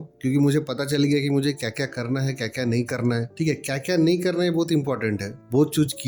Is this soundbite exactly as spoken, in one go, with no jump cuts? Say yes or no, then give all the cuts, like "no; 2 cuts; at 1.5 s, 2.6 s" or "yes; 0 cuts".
yes; 0 cuts